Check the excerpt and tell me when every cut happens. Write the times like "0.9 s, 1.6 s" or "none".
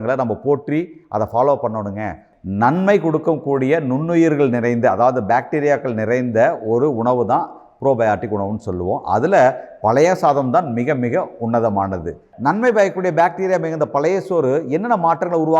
2.3 s, 12.3 s